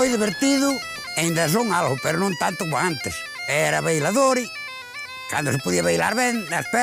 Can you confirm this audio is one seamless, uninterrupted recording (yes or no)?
no